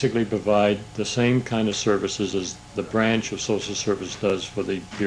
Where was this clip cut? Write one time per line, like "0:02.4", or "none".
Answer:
0:01.2